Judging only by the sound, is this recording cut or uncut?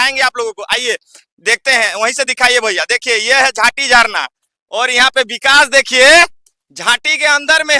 uncut